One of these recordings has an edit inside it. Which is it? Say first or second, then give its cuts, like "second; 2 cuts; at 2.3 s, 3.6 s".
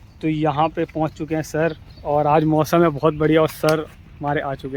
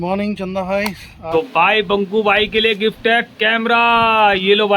second; 1 cut; at 1.6 s